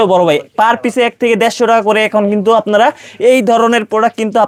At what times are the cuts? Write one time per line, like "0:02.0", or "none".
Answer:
none